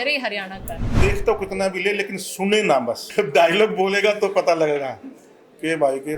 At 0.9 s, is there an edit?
yes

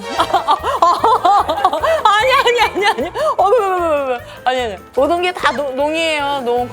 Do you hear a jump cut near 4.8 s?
yes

